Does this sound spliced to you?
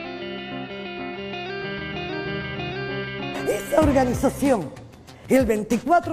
no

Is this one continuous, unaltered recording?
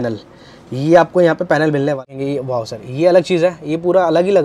no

